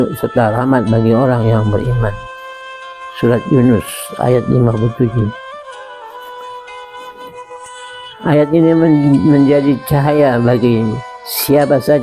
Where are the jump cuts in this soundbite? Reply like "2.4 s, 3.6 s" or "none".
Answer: 5.9 s, 8.2 s

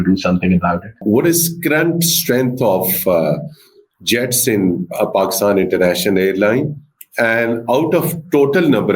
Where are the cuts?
1.0 s

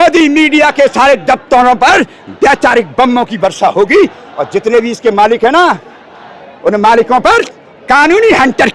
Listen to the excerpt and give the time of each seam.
none

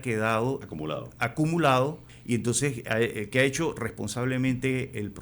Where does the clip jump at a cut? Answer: 2.1 s

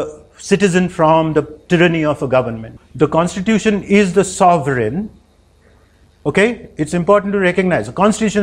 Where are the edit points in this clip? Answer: 2.8 s

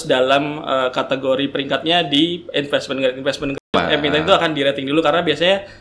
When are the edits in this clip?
3.7 s

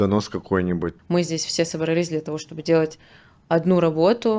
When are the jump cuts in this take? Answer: 0.9 s

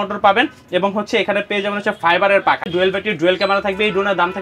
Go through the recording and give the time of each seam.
2.7 s

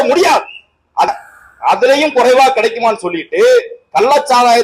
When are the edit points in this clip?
1.1 s

